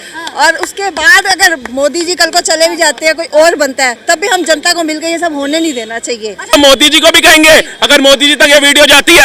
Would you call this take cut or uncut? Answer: cut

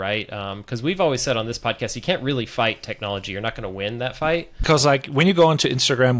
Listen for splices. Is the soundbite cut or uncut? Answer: cut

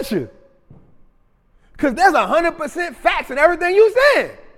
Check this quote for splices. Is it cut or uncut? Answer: uncut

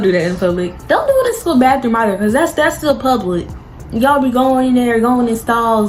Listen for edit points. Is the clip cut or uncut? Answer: uncut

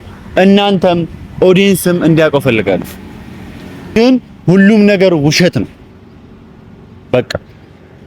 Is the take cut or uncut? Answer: cut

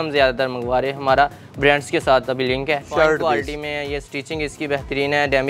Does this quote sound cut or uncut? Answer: cut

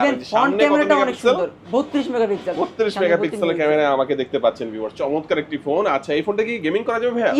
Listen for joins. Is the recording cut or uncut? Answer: uncut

